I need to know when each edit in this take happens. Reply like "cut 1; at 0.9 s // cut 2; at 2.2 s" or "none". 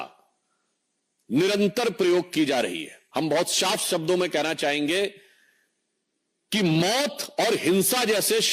cut 1; at 2.9 s